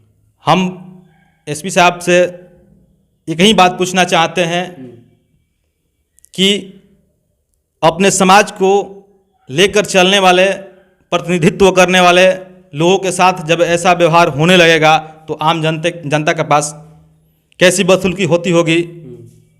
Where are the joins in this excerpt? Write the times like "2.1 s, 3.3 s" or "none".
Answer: none